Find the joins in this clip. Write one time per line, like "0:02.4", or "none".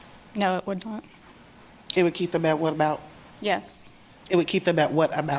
none